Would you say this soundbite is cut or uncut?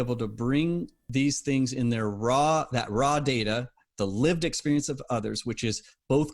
cut